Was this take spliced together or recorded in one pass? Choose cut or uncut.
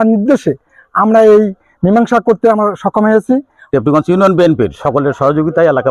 cut